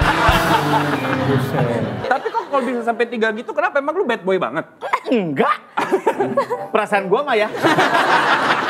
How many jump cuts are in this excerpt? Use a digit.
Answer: 1